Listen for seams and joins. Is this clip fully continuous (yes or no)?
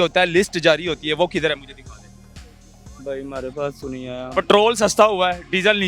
yes